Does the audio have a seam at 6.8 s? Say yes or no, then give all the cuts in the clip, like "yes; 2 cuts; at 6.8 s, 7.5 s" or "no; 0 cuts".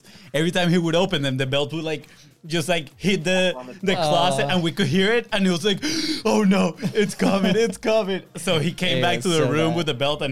no; 0 cuts